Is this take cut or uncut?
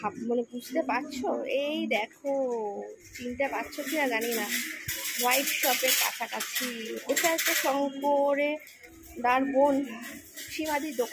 uncut